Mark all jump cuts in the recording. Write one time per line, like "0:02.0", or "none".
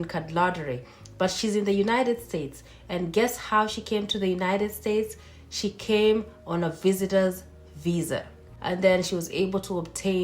0:08.4